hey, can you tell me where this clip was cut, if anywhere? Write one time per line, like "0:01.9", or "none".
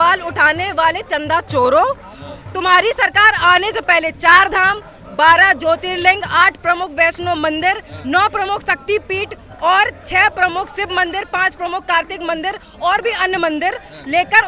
none